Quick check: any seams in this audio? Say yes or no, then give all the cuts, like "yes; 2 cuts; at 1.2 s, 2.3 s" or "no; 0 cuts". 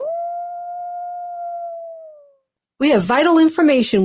yes; 1 cut; at 2.6 s